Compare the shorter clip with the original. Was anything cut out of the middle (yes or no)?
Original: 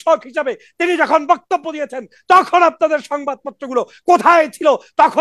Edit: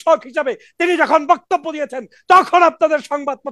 no